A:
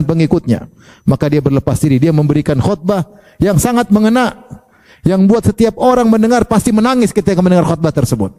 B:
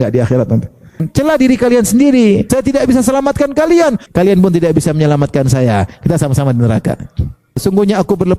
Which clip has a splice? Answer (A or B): B